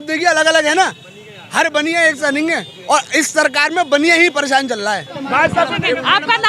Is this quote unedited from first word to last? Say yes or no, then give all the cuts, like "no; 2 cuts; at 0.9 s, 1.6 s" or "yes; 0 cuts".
no; 1 cut; at 5.1 s